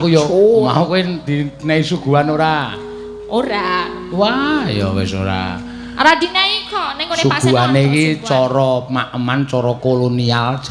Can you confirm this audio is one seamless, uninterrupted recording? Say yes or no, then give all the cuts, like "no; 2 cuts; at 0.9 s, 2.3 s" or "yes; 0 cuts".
yes; 0 cuts